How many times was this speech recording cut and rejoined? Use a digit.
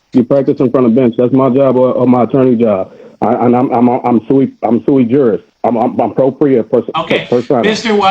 1